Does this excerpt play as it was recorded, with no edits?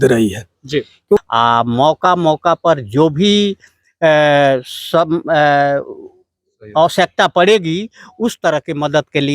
no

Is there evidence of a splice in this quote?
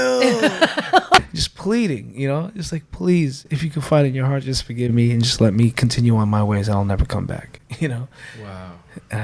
yes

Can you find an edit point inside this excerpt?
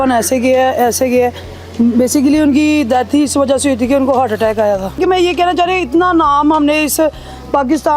yes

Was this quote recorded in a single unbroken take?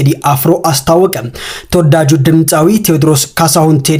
yes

